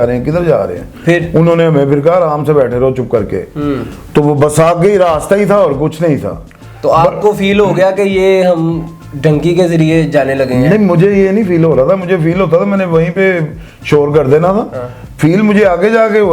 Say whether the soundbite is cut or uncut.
uncut